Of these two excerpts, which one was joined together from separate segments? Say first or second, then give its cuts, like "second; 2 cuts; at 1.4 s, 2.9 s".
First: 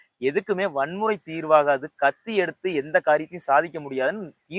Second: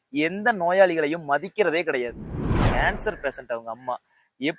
second; 1 cut; at 2.4 s